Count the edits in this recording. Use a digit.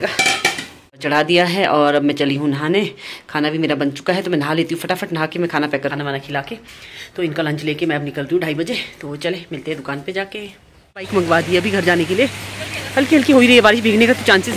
3